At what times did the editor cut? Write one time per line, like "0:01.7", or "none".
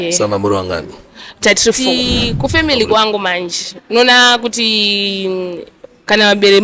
0:01.9